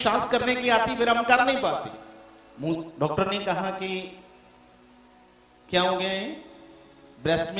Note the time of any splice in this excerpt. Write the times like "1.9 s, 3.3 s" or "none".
2.8 s